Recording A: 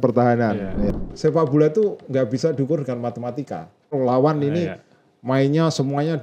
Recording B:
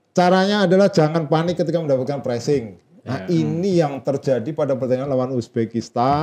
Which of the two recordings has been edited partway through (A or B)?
A